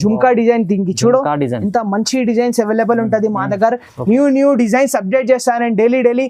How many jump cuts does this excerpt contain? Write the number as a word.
zero